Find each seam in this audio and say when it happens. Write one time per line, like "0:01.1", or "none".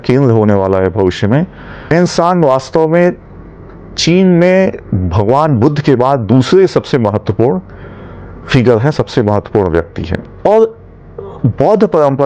0:01.9
0:10.2